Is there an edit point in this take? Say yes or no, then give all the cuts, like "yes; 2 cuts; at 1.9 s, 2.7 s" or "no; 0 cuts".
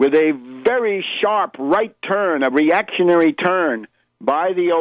yes; 1 cut; at 3.2 s